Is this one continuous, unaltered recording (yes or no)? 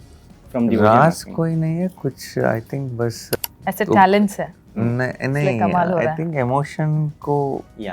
no